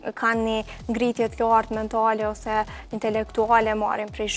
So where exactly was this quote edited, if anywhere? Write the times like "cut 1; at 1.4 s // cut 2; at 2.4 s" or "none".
none